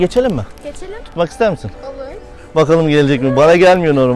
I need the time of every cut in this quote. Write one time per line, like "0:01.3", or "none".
0:01.0